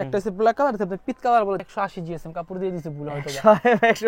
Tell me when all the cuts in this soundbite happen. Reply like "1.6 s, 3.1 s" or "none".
1.6 s